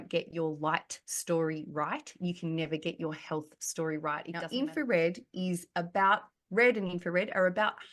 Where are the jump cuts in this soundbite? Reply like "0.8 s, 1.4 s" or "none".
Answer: 4.3 s